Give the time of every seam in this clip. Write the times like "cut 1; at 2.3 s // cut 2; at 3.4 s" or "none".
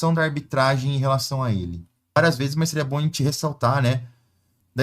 cut 1; at 2.2 s

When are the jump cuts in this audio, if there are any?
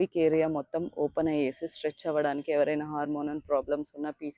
none

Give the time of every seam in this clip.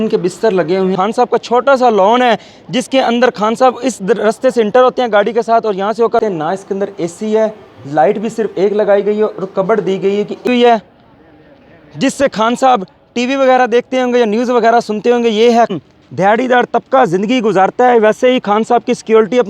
cut 1; at 0.9 s // cut 2; at 6.2 s // cut 3; at 10.5 s // cut 4; at 15.7 s

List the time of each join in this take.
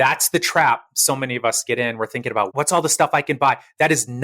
cut 1; at 2.5 s

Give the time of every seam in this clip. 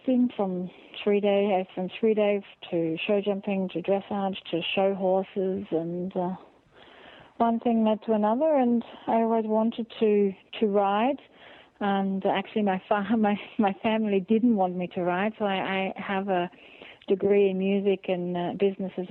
none

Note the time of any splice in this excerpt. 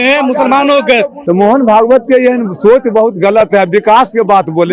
cut 1; at 1.2 s

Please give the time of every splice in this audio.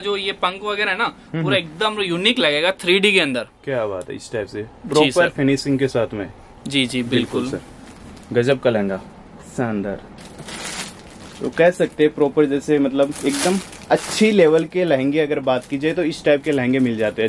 none

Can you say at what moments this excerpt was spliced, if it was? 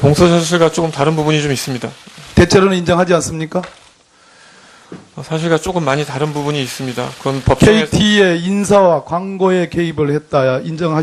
cut 1; at 7.4 s

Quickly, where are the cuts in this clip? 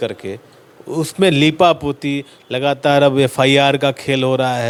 none

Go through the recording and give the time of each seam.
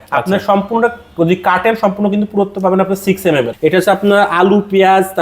cut 1; at 3.5 s

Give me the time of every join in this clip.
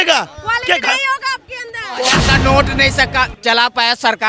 cut 1; at 2.0 s

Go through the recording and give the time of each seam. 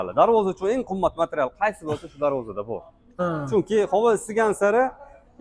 cut 1; at 3.0 s

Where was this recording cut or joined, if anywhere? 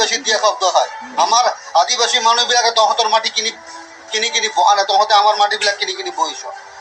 none

